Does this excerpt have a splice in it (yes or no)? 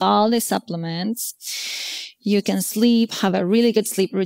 no